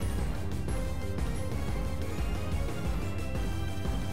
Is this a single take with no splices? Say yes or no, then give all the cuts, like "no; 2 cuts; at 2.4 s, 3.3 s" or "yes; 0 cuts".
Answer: yes; 0 cuts